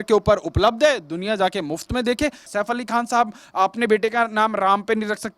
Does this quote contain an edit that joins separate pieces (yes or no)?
yes